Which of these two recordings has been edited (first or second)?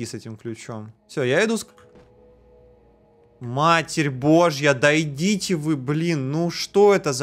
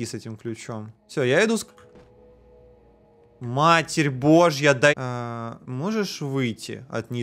second